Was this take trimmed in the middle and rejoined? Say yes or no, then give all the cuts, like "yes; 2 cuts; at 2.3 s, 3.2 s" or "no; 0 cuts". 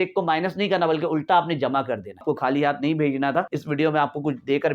yes; 2 cuts; at 2.2 s, 3.6 s